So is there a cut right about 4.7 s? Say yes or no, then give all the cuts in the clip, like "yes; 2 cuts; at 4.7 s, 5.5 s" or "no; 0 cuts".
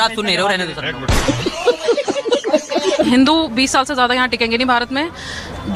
no; 2 cuts; at 1.1 s, 3.1 s